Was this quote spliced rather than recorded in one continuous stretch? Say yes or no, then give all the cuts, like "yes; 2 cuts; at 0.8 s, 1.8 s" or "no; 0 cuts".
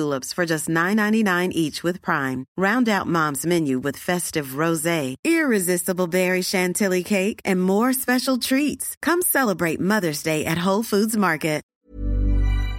yes; 1 cut; at 11.7 s